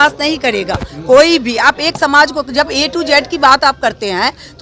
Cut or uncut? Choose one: uncut